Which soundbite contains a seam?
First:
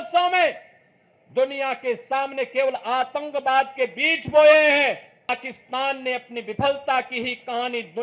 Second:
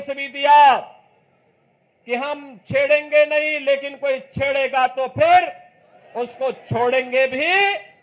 first; 1 cut; at 5.3 s

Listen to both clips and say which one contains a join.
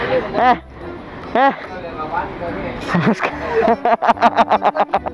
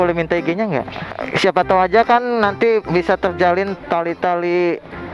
second; 1 cut; at 1.2 s

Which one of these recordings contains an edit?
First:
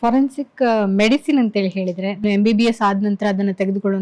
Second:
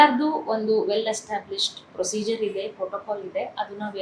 first; 1 cut; at 2.2 s

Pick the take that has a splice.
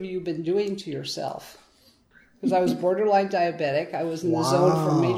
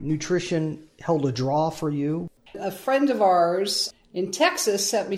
second; 2 cuts; at 2.5 s, 3.8 s

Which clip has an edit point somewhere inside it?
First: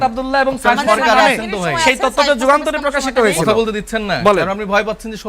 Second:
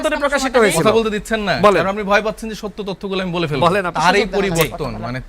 second; 1 cut; at 3.9 s

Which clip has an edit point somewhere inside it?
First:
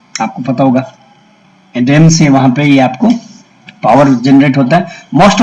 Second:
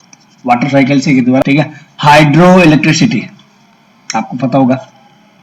second; 1 cut; at 1.4 s

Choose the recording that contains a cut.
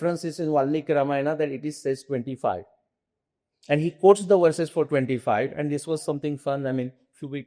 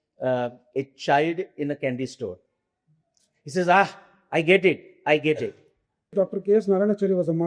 second; 1 cut; at 6.1 s

